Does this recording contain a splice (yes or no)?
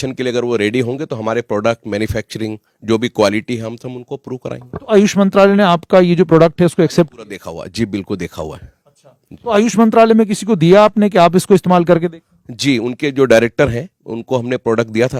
no